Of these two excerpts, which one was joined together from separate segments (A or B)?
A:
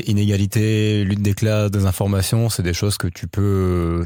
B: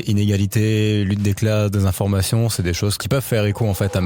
B